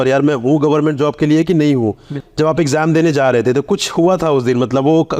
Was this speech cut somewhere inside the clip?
yes; 1 cut; at 2.1 s

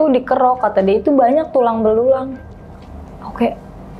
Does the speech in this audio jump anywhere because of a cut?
no; 0 cuts

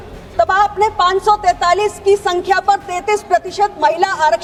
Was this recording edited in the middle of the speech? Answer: no; 0 cuts

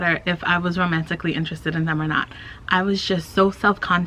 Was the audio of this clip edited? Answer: no; 0 cuts

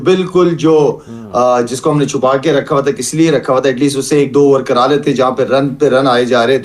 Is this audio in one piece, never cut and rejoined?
yes; 0 cuts

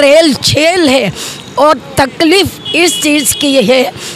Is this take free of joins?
yes; 0 cuts

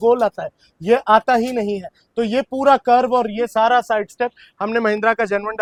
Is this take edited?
no; 0 cuts

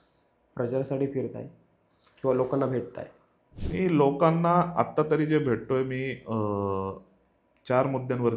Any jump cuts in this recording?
no; 0 cuts

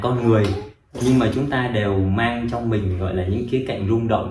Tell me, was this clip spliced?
no; 0 cuts

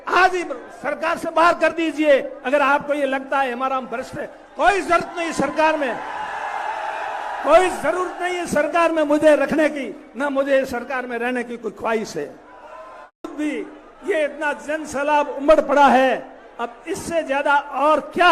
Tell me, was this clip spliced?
yes; 1 cut; at 13.3 s

